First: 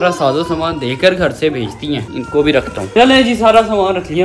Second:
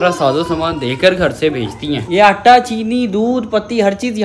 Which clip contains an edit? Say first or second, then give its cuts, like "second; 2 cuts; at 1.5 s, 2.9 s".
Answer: second; 1 cut; at 2.0 s